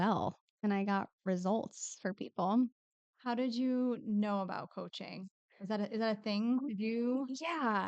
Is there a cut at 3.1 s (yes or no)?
no